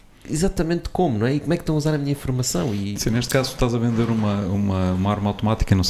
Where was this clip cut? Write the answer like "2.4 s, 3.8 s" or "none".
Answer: none